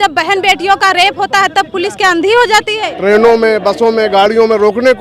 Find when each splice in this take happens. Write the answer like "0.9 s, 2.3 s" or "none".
2.8 s

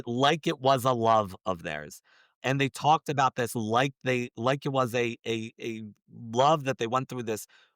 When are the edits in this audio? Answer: 2.3 s

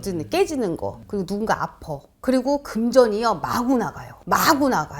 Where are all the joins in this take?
none

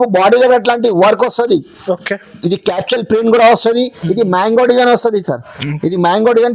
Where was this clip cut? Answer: none

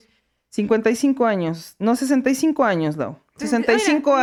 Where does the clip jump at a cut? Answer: none

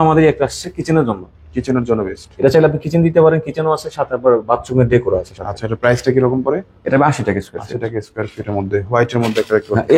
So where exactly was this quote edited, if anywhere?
none

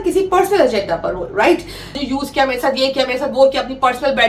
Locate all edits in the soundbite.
1.9 s

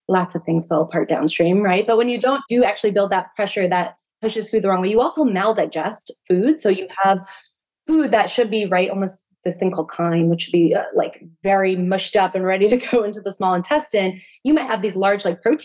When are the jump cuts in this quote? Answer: 2.4 s

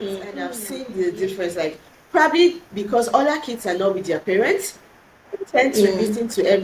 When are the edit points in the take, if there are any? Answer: 1.0 s

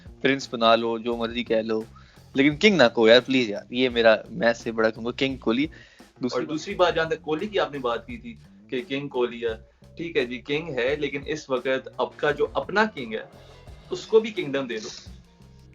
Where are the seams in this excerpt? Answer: 6.3 s

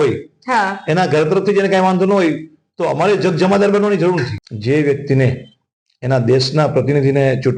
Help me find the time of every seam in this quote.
4.4 s

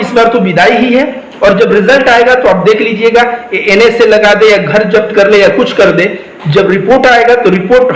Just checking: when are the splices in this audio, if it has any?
none

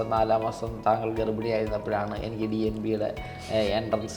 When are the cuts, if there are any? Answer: none

